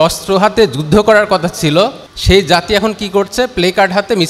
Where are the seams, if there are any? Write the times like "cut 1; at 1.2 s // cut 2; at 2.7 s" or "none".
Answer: cut 1; at 2.1 s